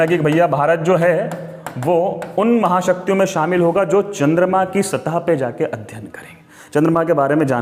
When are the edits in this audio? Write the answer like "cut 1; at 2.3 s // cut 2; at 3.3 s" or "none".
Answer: none